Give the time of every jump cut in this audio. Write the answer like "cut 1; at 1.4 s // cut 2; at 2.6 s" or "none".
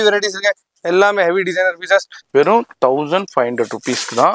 cut 1; at 2.2 s